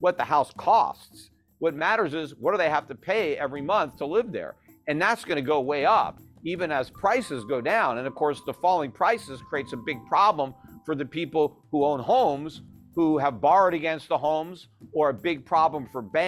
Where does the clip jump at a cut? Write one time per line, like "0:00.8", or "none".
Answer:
none

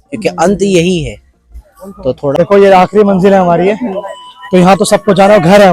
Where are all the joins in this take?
0:02.3

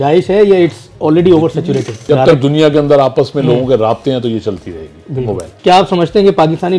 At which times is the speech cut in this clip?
0:02.0
0:05.4

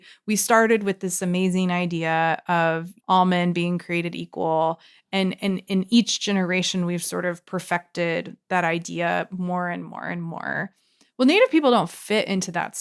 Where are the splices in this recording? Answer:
0:02.9

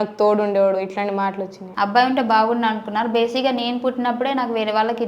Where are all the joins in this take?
0:01.6

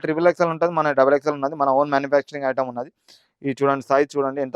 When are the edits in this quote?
none

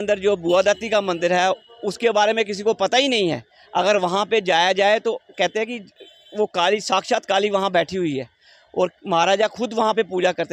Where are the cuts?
none

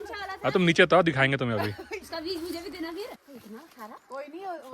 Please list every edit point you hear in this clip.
0:02.0
0:03.2

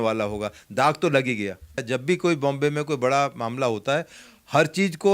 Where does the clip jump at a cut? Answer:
0:01.8

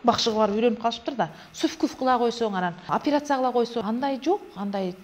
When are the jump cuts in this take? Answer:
0:02.8
0:03.8

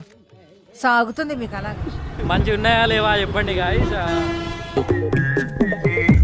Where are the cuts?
0:01.6

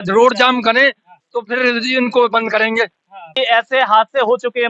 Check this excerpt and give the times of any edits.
0:03.3

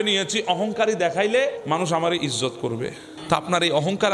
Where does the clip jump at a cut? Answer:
0:01.6
0:03.1

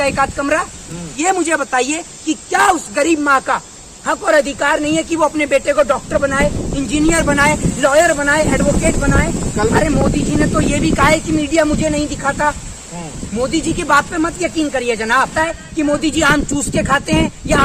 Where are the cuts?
0:01.2
0:09.7
0:15.3

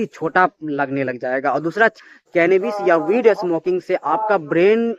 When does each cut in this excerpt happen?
0:02.0

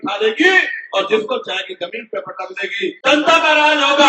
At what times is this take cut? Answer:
0:03.0

